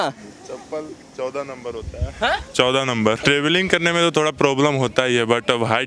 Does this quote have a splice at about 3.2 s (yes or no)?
yes